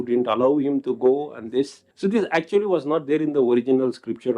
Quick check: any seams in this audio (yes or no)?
yes